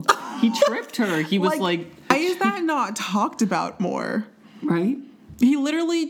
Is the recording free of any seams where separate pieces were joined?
no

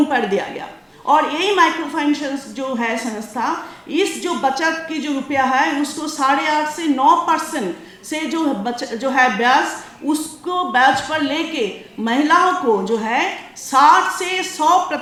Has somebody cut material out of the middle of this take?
no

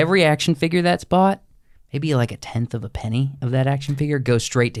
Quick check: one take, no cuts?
yes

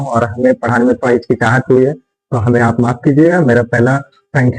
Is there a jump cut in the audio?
no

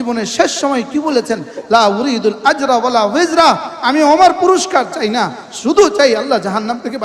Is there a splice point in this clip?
no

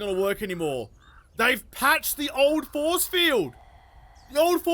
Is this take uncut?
yes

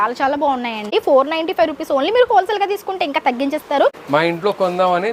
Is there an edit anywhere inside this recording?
yes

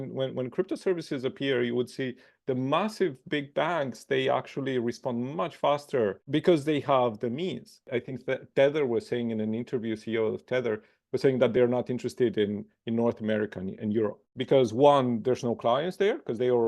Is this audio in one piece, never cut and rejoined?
no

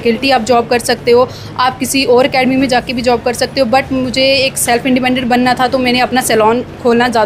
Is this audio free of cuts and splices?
yes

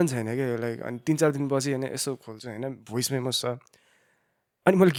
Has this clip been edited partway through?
no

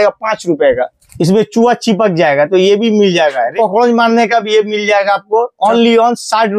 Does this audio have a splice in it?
yes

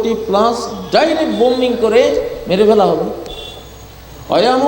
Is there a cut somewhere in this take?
no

